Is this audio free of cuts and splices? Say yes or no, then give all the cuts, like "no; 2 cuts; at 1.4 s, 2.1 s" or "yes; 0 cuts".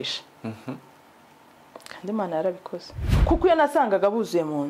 no; 1 cut; at 3.1 s